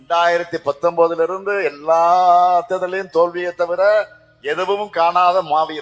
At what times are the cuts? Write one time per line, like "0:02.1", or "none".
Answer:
none